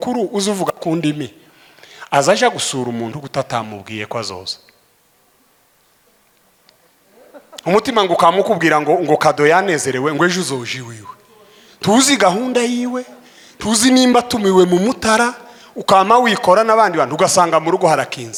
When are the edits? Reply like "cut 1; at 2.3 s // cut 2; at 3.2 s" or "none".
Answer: none